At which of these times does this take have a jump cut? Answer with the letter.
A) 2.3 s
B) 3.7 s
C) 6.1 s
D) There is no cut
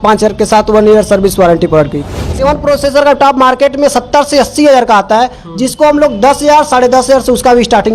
A